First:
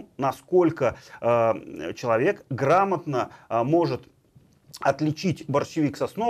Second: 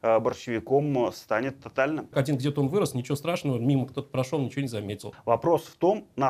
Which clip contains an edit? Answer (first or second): second